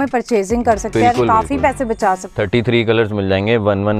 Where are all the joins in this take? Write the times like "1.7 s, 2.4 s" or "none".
2.3 s